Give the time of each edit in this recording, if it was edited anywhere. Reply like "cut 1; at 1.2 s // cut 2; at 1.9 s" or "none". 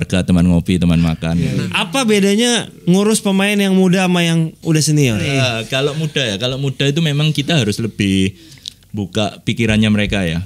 cut 1; at 1.5 s // cut 2; at 5.3 s